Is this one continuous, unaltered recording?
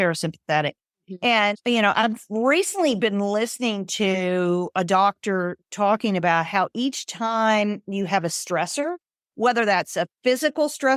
yes; 0 cuts

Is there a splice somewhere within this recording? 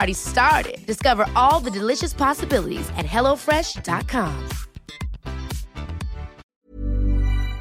yes; 1 cut; at 6.4 s

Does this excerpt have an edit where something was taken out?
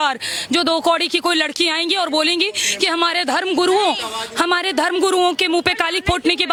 no; 0 cuts

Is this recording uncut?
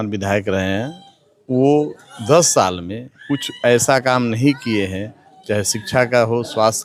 yes; 0 cuts

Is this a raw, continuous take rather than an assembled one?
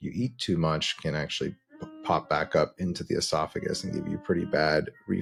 yes; 0 cuts

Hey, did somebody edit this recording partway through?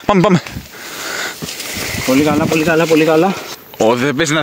yes; 1 cut; at 3.5 s

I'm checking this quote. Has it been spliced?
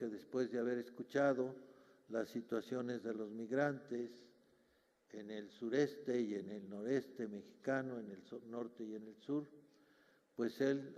yes; 1 cut; at 6.0 s

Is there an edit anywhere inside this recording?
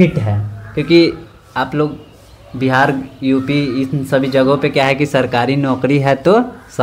no; 0 cuts

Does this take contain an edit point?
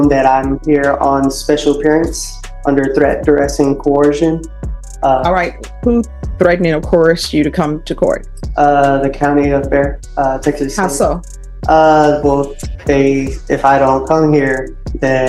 no; 0 cuts

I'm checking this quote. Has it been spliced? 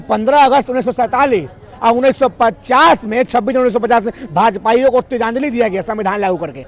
no; 0 cuts

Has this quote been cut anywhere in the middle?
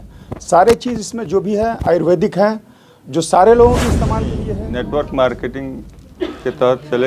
yes; 1 cut; at 4.4 s

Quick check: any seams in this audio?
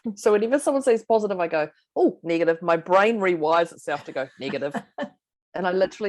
no; 0 cuts

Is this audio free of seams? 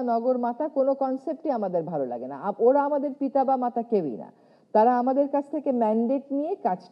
yes; 0 cuts

